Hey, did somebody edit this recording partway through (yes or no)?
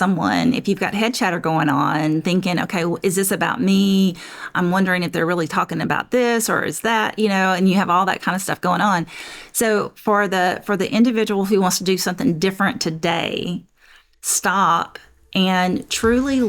no